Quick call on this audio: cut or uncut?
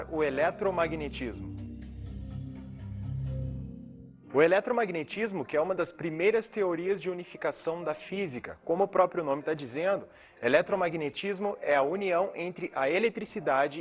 cut